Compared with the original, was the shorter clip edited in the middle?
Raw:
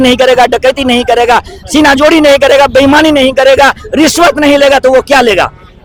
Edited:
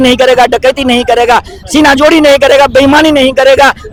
no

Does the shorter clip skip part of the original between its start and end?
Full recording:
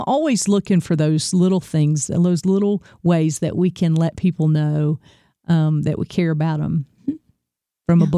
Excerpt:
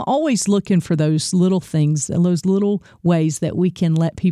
no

